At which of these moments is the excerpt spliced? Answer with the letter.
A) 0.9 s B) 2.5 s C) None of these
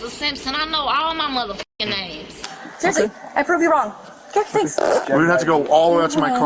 B